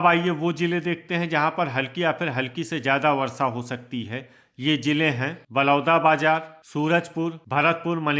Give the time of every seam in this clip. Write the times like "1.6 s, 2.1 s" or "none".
5.4 s, 6.9 s